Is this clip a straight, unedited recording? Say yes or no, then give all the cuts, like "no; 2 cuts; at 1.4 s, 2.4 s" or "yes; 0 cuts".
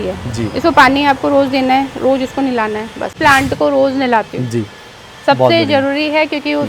no; 1 cut; at 3.1 s